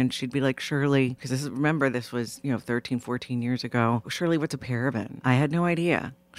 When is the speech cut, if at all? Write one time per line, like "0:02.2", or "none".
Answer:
0:01.2
0:04.1
0:05.1